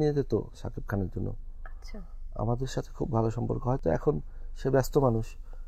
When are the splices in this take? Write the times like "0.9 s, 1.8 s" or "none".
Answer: none